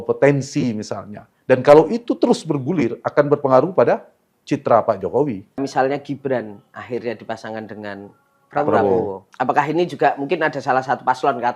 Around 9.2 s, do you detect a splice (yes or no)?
yes